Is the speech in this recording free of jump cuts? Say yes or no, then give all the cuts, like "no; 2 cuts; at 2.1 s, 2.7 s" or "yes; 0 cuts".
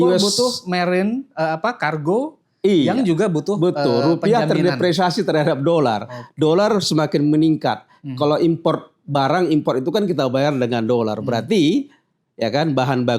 yes; 0 cuts